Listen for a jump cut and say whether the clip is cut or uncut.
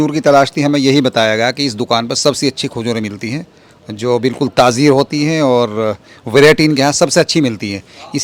uncut